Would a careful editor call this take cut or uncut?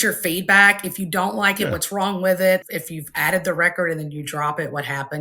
cut